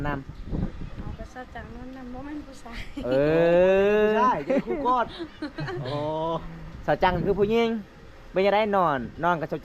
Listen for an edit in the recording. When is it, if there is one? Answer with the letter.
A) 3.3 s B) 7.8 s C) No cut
C